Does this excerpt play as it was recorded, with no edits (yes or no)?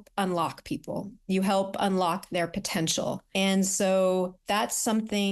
no